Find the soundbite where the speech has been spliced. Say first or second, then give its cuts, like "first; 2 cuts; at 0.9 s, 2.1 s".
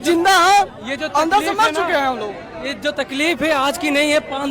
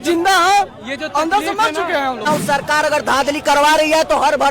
second; 1 cut; at 2.3 s